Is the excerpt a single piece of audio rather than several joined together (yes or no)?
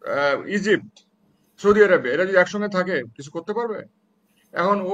yes